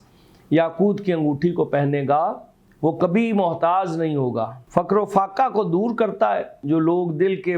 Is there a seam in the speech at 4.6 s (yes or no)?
yes